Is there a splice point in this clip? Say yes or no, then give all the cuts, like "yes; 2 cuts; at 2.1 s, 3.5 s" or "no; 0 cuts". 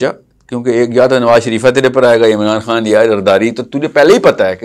no; 0 cuts